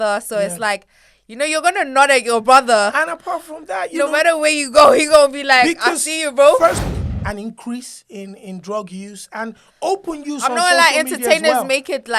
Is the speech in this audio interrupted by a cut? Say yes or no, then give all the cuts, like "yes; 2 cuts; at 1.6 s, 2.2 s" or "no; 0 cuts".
yes; 1 cut; at 6.9 s